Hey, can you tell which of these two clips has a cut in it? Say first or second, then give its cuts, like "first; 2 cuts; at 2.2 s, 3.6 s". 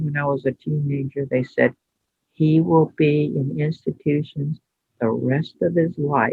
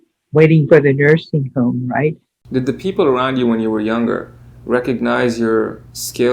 second; 1 cut; at 2.3 s